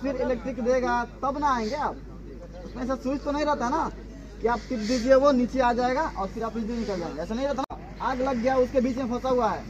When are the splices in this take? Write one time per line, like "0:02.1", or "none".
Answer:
0:07.6